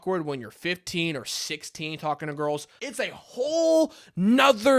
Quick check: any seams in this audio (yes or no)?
yes